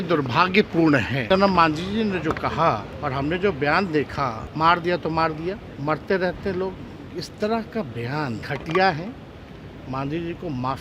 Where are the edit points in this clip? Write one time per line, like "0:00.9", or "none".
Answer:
0:01.2
0:02.9
0:04.4
0:05.7
0:08.4